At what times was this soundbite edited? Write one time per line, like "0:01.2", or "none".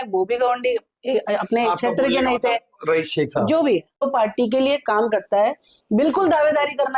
0:04.0

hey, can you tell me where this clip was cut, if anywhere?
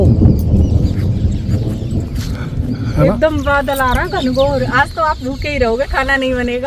none

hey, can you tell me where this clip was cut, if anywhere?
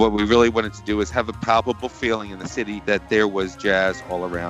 none

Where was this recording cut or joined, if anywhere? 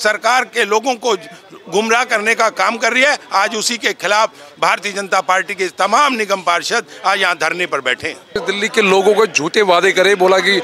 0:08.4

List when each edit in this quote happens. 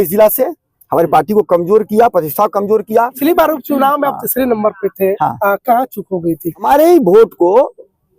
0:03.2
0:06.6

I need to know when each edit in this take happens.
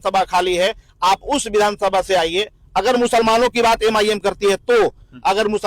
none

